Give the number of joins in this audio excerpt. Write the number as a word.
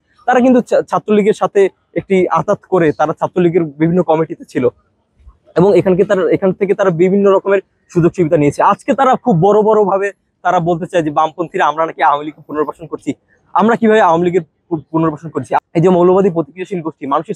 one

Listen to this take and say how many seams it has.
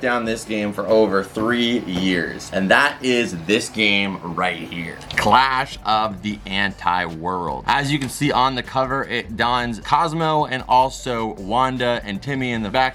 zero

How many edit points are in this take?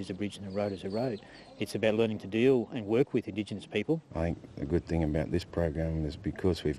one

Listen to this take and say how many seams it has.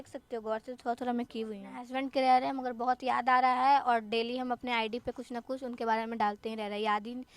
one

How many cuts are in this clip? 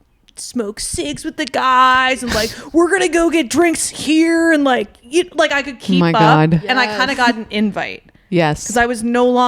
zero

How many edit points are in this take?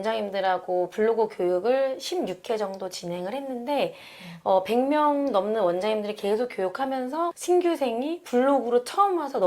one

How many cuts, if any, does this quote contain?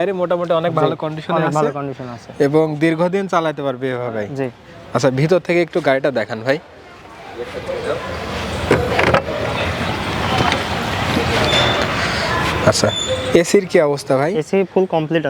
zero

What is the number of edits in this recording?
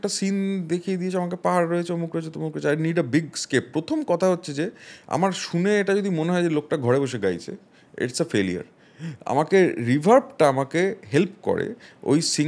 zero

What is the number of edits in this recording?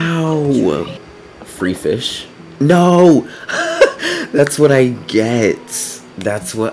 one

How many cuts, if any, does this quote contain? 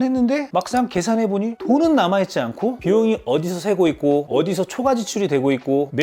one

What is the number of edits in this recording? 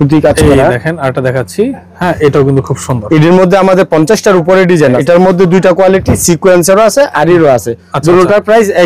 one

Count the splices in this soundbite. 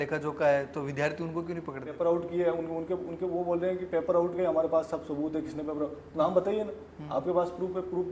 one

